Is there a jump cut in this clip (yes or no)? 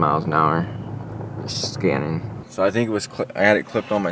yes